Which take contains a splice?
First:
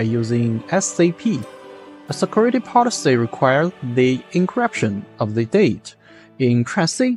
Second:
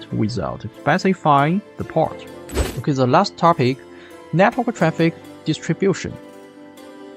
second; 1 cut; at 2.6 s

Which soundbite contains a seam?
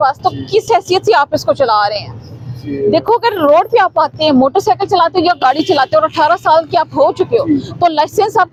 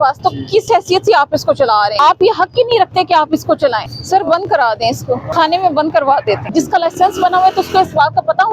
second; 4 cuts; at 2.0 s, 3.9 s, 5.3 s, 6.5 s

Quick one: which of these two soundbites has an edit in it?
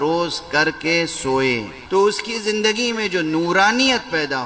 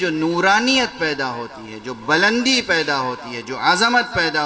first; 1 cut; at 1.7 s

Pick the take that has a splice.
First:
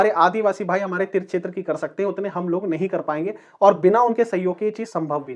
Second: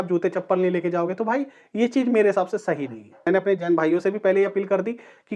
second; 1 cut; at 3.3 s

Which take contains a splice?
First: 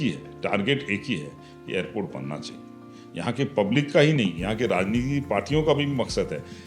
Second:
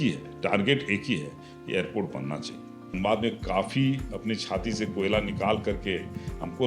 second; 1 cut; at 2.9 s

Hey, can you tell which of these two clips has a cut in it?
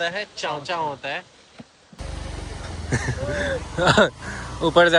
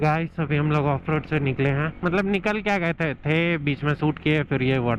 first; 1 cut; at 2.0 s

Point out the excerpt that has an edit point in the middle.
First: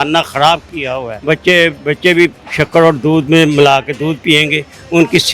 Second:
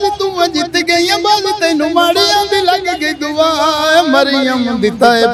first; 1 cut; at 1.1 s

